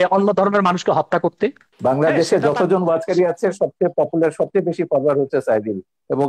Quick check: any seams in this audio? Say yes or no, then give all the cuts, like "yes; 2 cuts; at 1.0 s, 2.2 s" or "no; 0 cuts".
yes; 1 cut; at 1.7 s